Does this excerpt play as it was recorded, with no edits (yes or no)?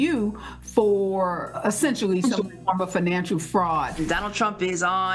no